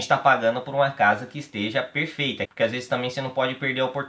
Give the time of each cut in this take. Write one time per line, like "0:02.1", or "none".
0:02.5